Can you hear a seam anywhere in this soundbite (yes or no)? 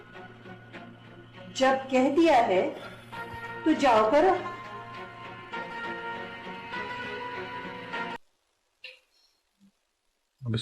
yes